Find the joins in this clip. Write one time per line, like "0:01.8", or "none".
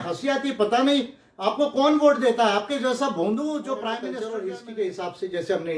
0:04.0